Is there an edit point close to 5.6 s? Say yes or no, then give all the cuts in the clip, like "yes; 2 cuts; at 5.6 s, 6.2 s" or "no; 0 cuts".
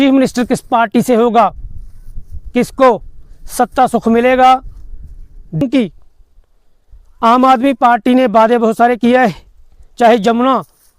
yes; 1 cut; at 5.6 s